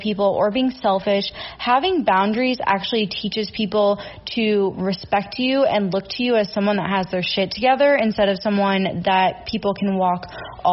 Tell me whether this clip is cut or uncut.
uncut